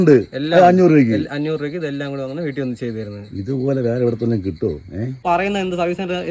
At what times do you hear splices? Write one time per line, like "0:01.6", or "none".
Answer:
0:05.2